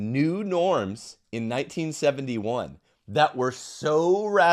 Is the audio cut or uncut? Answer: uncut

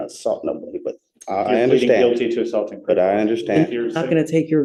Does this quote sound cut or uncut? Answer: uncut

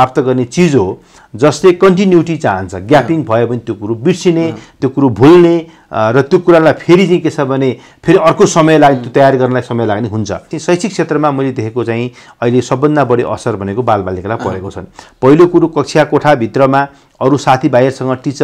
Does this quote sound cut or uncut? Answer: cut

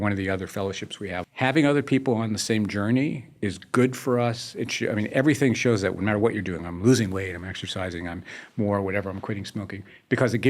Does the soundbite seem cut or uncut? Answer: cut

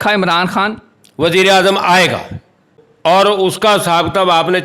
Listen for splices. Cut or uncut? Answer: cut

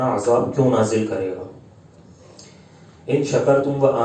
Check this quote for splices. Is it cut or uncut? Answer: uncut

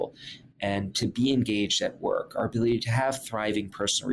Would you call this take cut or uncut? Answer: uncut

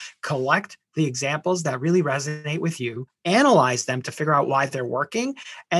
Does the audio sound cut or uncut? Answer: cut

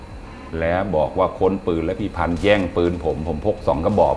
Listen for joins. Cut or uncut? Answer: uncut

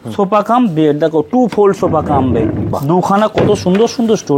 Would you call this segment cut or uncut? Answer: cut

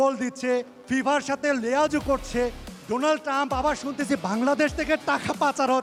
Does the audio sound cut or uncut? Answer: uncut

